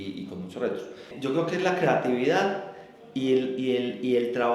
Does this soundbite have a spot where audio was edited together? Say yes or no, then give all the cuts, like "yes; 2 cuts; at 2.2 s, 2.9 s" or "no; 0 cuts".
yes; 1 cut; at 1.1 s